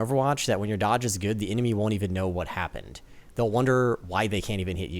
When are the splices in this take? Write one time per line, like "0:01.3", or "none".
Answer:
none

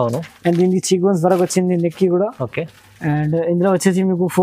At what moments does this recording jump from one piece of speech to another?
none

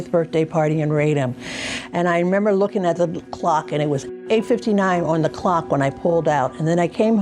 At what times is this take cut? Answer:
0:04.1

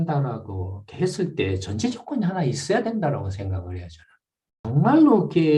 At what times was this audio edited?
0:04.6

